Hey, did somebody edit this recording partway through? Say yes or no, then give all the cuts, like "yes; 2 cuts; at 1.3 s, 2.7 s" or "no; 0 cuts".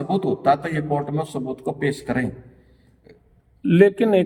no; 0 cuts